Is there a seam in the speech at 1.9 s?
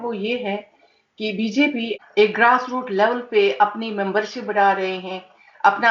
yes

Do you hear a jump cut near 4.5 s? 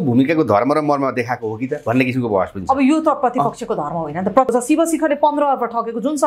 yes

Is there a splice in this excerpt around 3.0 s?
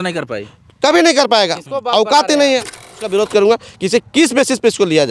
yes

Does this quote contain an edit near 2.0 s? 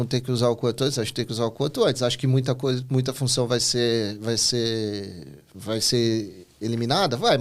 no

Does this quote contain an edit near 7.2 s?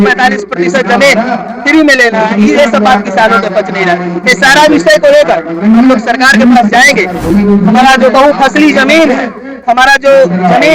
yes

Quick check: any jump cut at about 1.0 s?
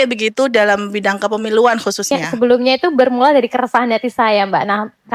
no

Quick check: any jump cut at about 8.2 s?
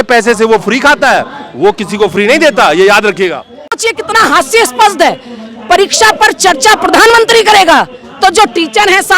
no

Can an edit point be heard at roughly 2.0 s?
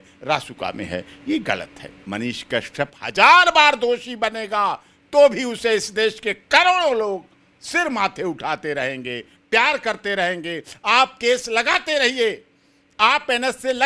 yes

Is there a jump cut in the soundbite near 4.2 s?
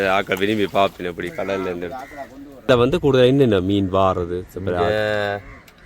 no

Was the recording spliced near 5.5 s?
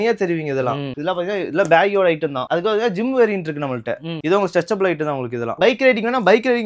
yes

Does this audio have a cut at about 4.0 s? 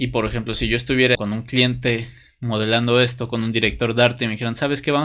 no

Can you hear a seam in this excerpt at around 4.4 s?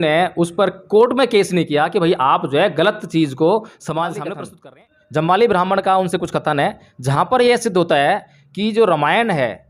yes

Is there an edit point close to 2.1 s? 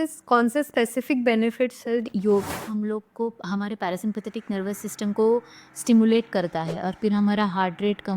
yes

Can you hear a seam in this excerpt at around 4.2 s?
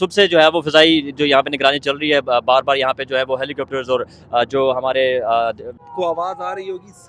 no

